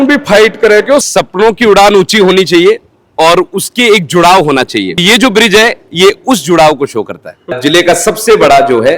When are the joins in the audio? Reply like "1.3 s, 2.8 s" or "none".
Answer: 1.0 s, 5.0 s, 7.5 s